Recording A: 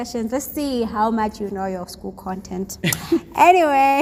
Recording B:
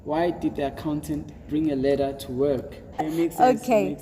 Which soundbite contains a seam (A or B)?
B